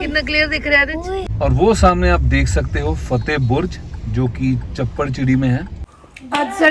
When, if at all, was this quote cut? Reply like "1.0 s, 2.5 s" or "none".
1.3 s, 5.8 s